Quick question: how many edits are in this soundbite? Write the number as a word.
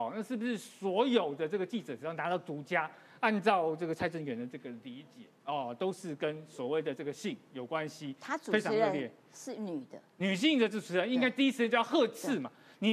zero